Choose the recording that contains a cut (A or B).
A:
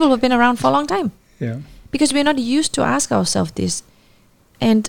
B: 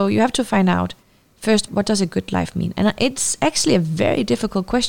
B